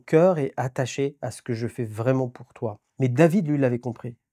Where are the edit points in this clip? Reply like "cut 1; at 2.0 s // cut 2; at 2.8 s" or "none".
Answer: cut 1; at 2.8 s